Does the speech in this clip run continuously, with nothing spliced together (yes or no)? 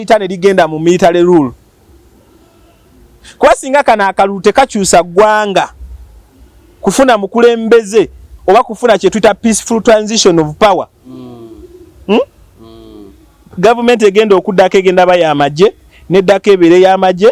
yes